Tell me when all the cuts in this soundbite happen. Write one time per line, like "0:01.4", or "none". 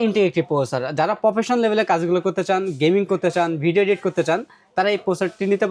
none